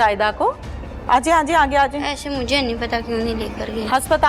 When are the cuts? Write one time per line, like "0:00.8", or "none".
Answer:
none